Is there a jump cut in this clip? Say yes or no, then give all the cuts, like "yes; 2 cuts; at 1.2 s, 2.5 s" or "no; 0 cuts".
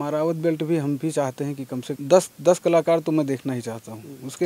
yes; 1 cut; at 2.0 s